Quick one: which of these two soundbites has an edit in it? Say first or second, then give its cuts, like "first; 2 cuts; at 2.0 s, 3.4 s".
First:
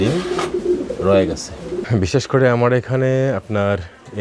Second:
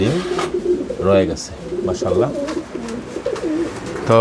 first; 1 cut; at 1.8 s